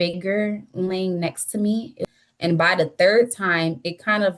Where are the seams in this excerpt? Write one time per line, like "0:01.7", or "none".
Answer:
0:02.0

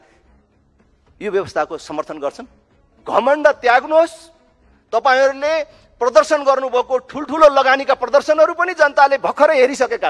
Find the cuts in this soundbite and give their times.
0:02.9

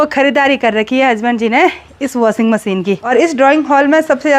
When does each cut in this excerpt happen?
0:03.0

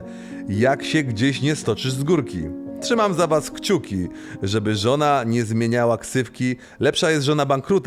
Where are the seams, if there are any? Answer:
none

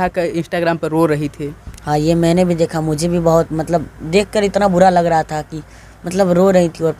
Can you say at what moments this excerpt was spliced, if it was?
none

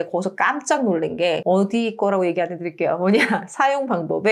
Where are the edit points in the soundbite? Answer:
none

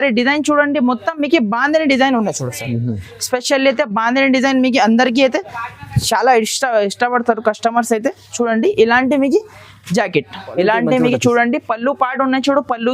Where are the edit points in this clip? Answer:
0:10.4

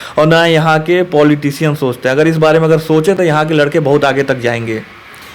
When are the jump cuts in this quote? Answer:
none

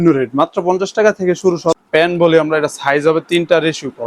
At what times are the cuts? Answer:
0:01.8

